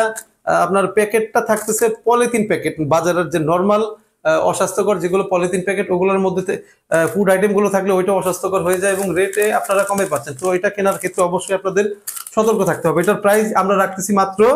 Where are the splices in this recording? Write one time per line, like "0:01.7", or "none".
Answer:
none

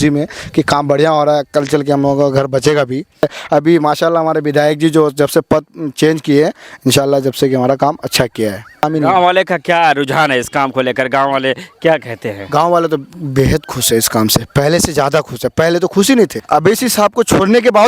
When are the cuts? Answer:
0:03.2
0:08.8
0:16.4

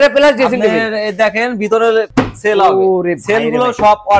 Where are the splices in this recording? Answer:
0:02.1

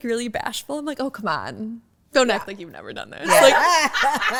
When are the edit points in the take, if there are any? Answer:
none

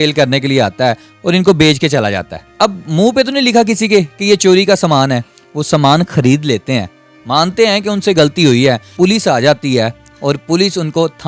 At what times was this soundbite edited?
0:02.5
0:08.9

